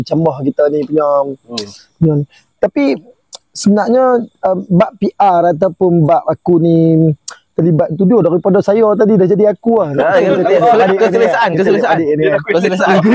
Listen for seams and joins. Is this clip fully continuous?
yes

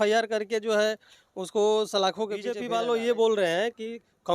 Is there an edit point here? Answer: yes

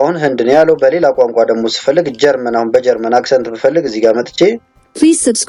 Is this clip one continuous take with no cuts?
yes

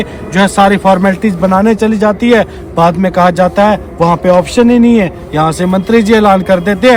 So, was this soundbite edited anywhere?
no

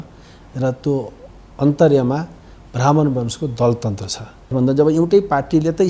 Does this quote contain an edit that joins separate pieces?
yes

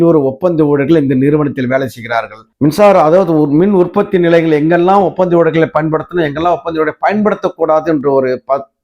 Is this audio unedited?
no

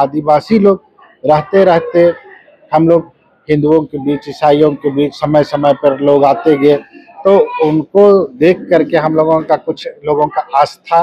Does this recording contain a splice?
no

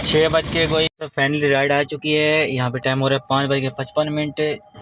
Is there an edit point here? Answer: yes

